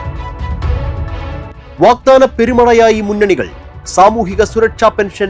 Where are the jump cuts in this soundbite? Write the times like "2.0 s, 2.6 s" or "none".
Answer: 1.6 s